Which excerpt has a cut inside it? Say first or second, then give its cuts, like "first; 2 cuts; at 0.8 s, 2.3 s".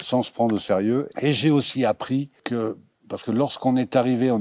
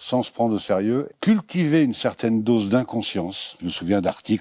second; 2 cuts; at 1.1 s, 3.6 s